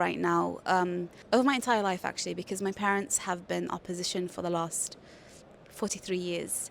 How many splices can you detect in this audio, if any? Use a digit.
1